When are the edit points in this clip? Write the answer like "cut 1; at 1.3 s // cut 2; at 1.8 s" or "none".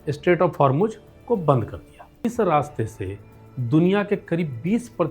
cut 1; at 2.2 s

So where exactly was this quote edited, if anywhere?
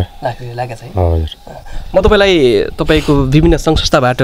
none

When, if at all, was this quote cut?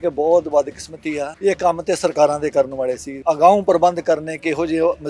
cut 1; at 1.3 s // cut 2; at 3.1 s

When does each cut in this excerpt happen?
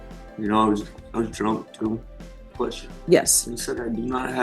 cut 1; at 2.5 s

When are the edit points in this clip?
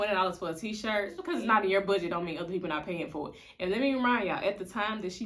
cut 1; at 1.2 s

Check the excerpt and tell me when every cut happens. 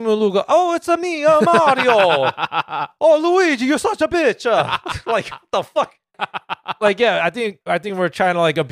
cut 1; at 6.2 s // cut 2; at 7.6 s

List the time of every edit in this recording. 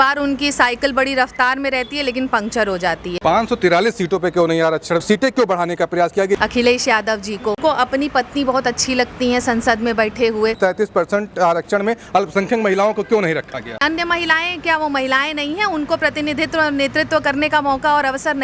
cut 1; at 3.1 s // cut 2; at 6.3 s // cut 3; at 7.6 s // cut 4; at 10.6 s // cut 5; at 13.8 s

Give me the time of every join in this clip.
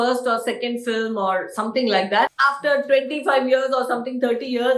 cut 1; at 2.3 s

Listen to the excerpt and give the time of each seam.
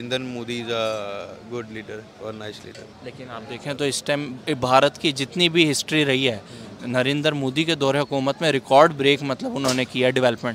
none

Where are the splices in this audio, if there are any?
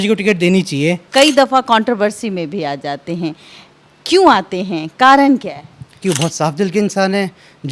cut 1; at 1.0 s // cut 2; at 6.0 s

